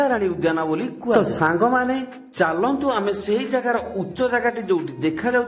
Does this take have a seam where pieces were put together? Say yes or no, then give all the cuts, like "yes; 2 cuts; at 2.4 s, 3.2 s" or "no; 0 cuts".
no; 0 cuts